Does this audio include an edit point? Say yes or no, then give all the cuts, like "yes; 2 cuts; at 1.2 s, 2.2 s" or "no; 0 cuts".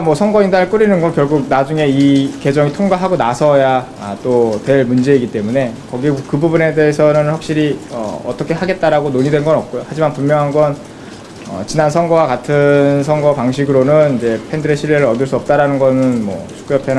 no; 0 cuts